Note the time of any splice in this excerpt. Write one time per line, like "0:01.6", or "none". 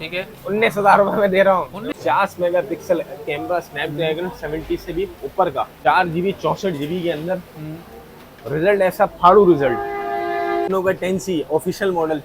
0:01.8
0:05.7
0:10.7